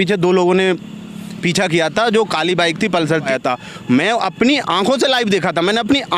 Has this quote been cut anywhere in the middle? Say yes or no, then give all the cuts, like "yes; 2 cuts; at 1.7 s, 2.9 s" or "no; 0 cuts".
yes; 1 cut; at 3.3 s